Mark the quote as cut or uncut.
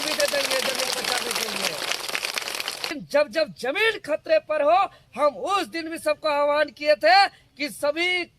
cut